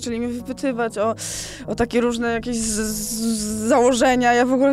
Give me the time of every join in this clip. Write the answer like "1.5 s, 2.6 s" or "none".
none